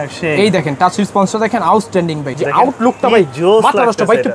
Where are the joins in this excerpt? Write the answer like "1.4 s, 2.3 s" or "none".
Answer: 2.3 s